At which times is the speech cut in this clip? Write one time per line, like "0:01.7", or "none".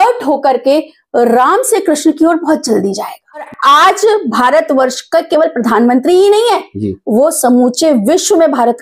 0:03.5